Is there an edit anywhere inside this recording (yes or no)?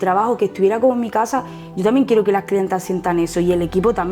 no